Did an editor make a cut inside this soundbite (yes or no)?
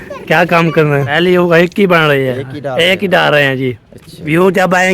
yes